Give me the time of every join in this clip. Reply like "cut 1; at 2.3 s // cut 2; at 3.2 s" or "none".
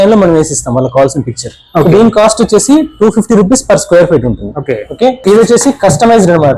cut 1; at 5.2 s